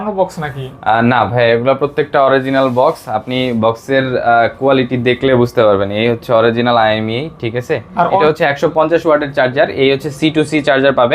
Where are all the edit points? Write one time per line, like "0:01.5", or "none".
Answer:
0:08.2